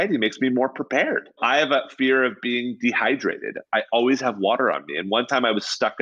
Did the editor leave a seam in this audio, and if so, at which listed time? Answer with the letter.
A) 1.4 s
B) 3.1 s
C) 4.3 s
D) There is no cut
A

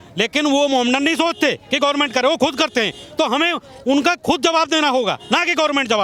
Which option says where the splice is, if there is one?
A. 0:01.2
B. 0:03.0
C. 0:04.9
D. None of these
D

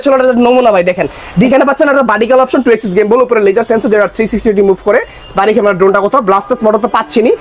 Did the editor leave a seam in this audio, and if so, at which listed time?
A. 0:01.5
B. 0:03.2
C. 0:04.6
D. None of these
A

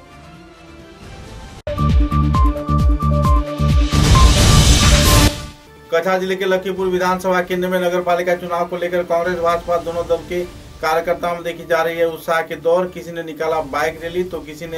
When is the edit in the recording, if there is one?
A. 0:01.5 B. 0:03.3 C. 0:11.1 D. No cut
A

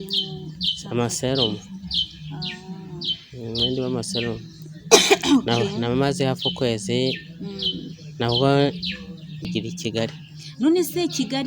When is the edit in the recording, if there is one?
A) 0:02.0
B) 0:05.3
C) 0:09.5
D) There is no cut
C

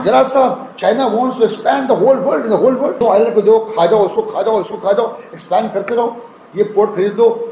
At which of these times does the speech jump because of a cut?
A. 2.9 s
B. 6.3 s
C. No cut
A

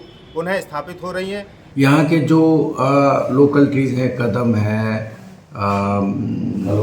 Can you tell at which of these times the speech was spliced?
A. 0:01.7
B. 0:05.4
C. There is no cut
A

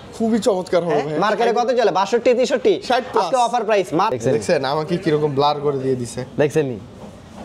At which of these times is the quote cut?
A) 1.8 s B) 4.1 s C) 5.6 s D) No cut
B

